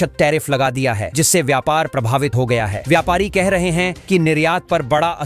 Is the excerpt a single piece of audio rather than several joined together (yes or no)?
yes